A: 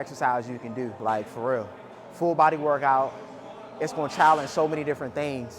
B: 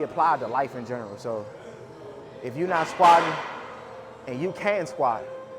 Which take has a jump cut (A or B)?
A